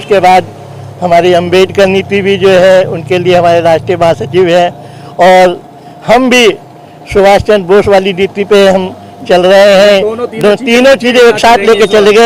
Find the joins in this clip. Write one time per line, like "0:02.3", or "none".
none